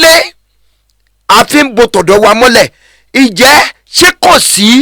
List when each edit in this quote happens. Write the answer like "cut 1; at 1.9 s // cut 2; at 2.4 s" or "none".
none